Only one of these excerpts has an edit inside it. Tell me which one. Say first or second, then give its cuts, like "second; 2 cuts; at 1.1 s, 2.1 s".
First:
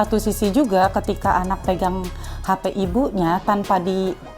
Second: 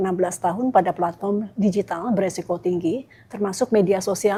first; 1 cut; at 1.6 s